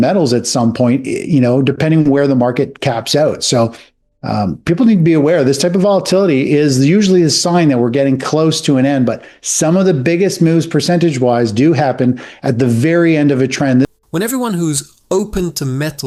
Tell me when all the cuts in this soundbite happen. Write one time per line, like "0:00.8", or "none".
none